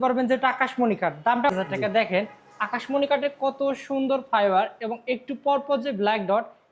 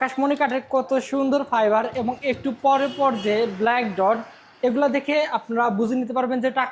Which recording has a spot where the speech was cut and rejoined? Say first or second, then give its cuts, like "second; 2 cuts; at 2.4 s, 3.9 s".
first; 1 cut; at 1.5 s